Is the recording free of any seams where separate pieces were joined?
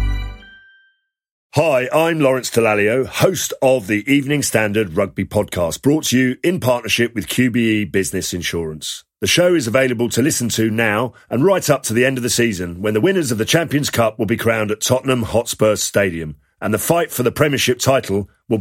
no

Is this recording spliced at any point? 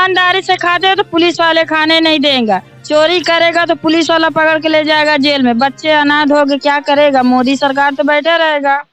no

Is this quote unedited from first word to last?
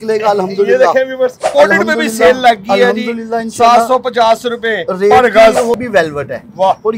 no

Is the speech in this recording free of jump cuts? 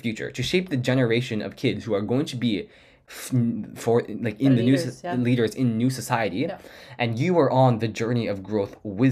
yes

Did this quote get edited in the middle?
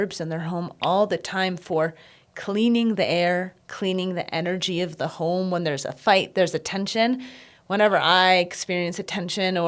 no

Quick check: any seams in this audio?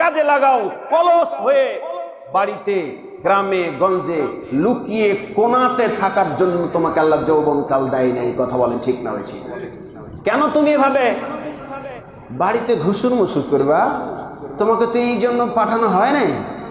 no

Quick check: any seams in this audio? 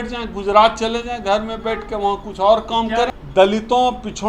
yes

